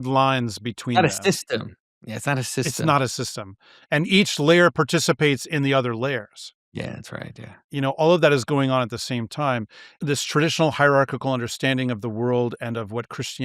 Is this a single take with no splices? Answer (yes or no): no